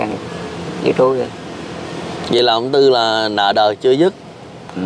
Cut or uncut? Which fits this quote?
uncut